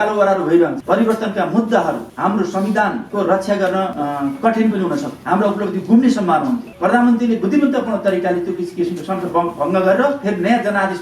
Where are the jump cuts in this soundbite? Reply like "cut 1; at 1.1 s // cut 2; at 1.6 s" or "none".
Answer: cut 1; at 0.8 s // cut 2; at 2.1 s // cut 3; at 3.0 s // cut 4; at 3.9 s // cut 5; at 5.1 s // cut 6; at 6.7 s